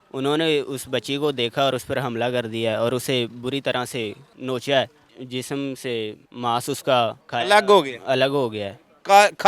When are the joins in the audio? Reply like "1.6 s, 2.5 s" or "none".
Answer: 4.3 s, 5.2 s, 6.2 s, 7.2 s

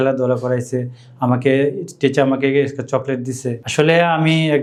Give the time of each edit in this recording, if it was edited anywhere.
none

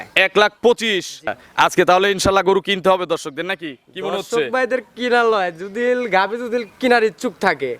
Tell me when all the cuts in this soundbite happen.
1.4 s

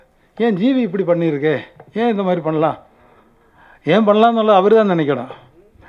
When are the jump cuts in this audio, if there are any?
none

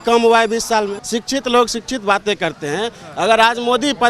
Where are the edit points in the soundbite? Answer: 1.0 s

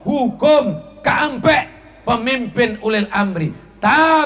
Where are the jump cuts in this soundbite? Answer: none

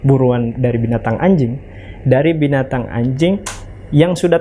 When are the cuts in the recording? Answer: none

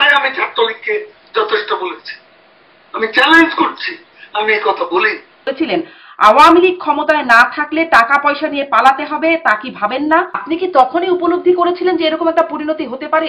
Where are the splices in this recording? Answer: 5.4 s, 10.4 s

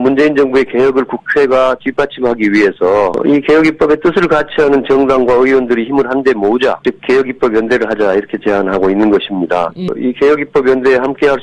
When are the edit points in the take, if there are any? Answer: 3.2 s, 6.8 s, 9.9 s

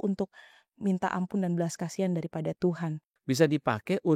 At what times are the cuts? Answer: 3.1 s

